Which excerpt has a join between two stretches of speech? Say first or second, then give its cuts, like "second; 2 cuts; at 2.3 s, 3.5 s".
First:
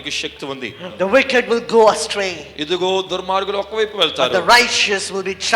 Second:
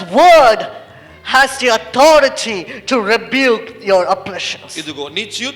first; 1 cut; at 0.9 s